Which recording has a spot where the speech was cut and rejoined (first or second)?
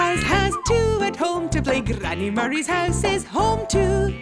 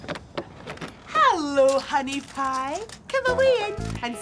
second